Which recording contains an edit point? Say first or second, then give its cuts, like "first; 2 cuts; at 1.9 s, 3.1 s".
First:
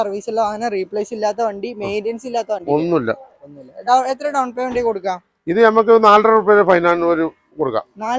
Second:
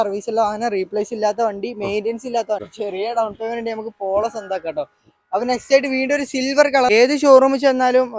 second; 2 cuts; at 2.6 s, 7.0 s